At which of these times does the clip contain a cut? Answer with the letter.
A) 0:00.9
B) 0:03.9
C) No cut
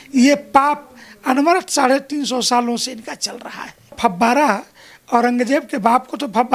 B